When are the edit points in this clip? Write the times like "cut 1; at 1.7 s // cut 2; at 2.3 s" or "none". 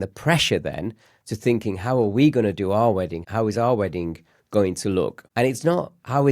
cut 1; at 3.2 s // cut 2; at 5.2 s